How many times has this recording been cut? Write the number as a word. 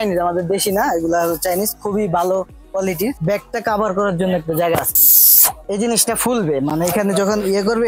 two